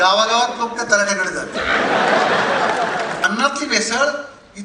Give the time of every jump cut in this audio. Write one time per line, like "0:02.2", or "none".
0:03.2